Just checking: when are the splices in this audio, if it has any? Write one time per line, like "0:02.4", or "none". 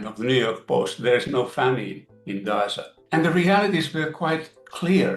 0:02.9